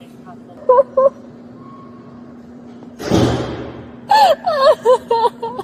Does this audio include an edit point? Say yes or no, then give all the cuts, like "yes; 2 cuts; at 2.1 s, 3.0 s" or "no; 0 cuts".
no; 0 cuts